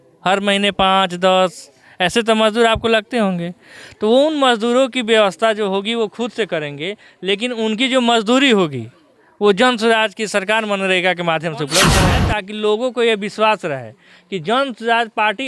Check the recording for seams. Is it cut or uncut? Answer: cut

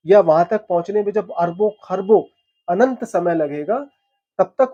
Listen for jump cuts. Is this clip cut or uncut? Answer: uncut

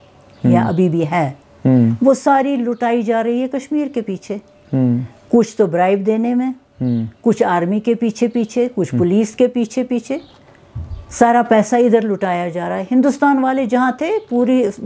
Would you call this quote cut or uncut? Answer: uncut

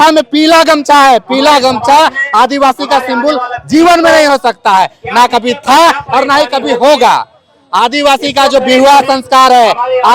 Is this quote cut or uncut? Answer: uncut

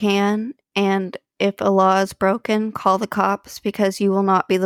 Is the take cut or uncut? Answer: uncut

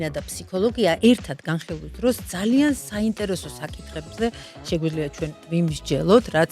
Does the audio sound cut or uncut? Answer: cut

